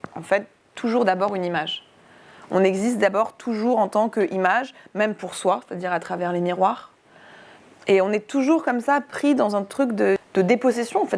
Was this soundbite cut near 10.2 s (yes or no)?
yes